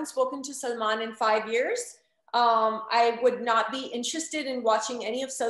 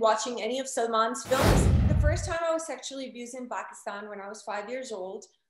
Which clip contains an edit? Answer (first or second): second